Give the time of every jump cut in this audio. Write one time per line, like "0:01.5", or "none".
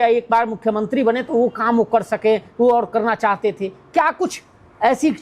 none

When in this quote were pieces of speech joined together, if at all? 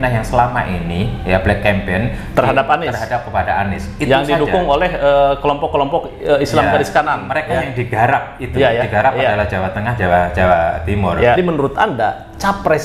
0:11.4

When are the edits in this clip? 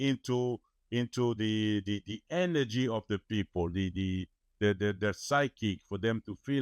none

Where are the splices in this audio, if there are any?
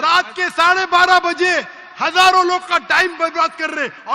none

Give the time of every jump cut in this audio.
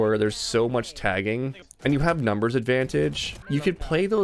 0:01.6
0:03.3

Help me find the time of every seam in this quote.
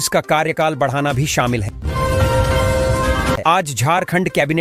0:01.8
0:03.4

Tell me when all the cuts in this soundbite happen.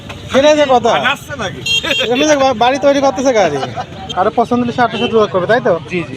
0:04.0

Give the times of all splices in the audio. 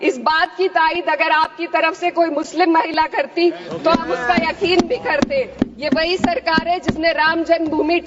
0:05.5

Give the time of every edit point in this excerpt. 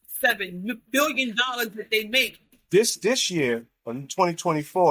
0:02.6

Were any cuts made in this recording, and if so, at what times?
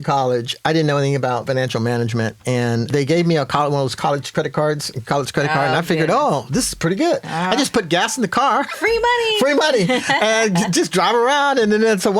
0:01.4
0:02.9
0:04.3

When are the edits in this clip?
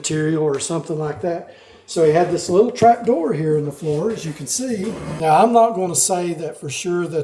0:05.1

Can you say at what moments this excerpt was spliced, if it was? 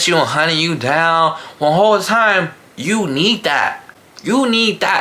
none

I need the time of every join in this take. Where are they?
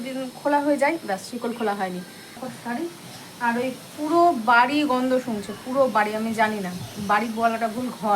0:02.4

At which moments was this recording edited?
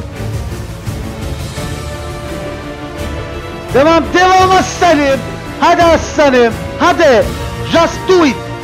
none

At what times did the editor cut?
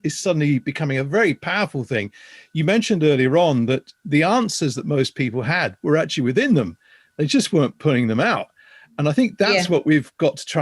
none

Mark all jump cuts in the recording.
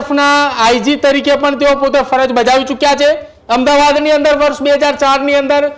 0:03.3

